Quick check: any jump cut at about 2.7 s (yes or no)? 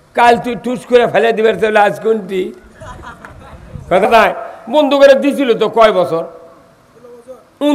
no